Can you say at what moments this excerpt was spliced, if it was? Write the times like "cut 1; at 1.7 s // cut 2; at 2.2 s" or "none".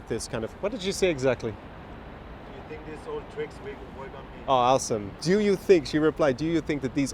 cut 1; at 5.1 s